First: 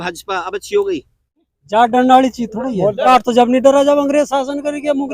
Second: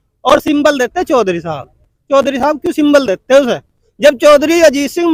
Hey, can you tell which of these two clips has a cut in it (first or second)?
first